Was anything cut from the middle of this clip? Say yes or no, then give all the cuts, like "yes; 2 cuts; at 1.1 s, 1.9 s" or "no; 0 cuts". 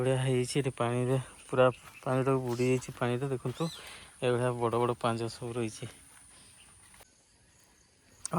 yes; 1 cut; at 7.0 s